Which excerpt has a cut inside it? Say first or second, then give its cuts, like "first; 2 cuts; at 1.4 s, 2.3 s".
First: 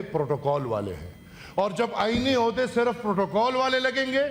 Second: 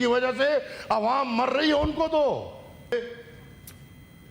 second; 1 cut; at 2.9 s